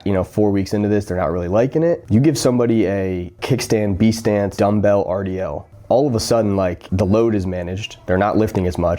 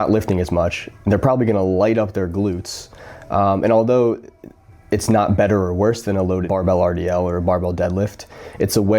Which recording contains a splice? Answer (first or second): first